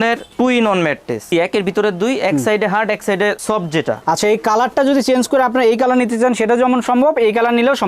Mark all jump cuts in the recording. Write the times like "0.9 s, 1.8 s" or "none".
1.3 s, 4.0 s